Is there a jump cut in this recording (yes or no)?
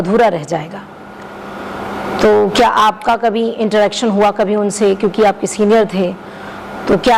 no